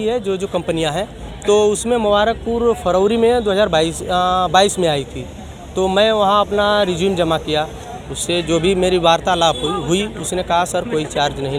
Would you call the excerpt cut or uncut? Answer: uncut